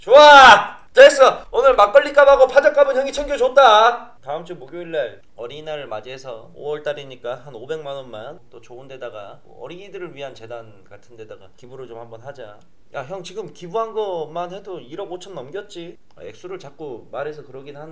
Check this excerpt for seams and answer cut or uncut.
cut